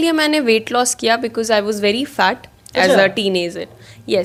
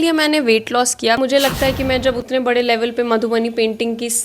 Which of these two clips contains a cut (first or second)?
second